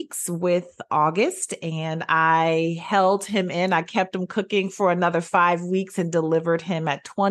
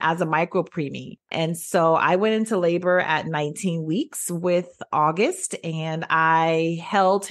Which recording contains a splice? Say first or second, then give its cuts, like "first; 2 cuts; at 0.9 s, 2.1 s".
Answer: second; 1 cut; at 1.3 s